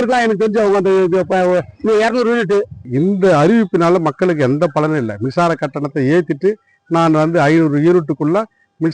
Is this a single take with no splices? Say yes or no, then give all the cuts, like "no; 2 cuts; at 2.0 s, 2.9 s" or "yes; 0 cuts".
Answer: no; 1 cut; at 2.8 s